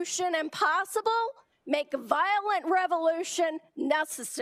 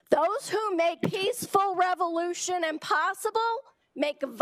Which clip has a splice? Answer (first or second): second